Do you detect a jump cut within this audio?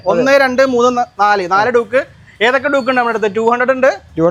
no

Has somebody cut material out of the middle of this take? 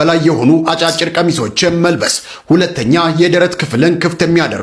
no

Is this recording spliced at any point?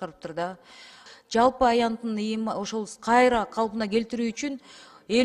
yes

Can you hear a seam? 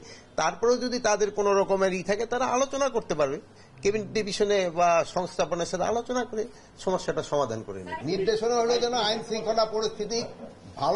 no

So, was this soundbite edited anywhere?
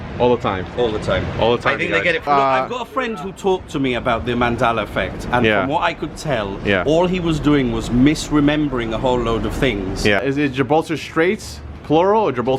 yes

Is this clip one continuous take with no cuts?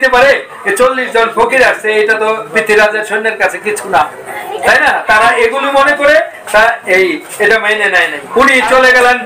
no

